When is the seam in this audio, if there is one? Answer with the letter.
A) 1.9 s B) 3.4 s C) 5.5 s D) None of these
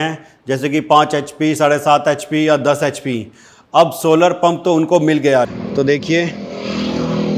C